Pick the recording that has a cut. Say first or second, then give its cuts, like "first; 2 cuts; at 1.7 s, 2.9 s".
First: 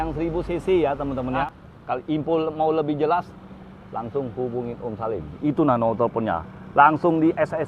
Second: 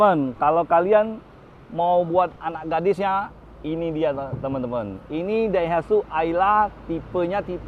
first; 1 cut; at 1.4 s